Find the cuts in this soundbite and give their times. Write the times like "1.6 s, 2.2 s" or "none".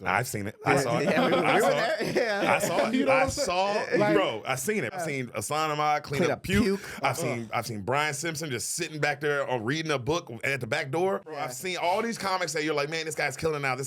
5.0 s, 11.5 s